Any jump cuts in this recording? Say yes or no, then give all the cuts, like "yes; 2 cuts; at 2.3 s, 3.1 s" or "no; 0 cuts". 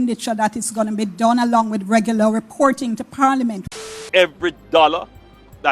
yes; 1 cut; at 3.7 s